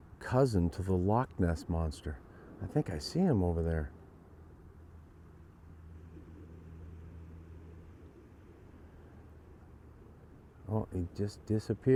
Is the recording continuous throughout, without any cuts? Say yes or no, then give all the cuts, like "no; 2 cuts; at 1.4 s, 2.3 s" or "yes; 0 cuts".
yes; 0 cuts